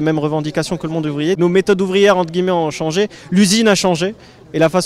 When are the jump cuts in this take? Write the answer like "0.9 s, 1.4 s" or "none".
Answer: 1.4 s